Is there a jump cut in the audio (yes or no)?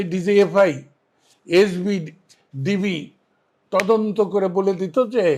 no